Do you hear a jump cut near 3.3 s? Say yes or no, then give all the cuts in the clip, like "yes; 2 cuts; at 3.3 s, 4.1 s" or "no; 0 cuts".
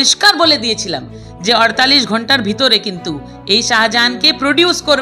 no; 0 cuts